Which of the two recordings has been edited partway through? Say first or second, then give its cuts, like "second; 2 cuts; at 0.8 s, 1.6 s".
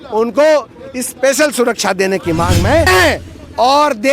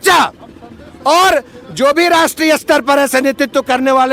first; 1 cut; at 2.9 s